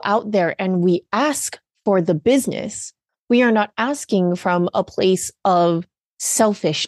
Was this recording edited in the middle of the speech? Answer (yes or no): no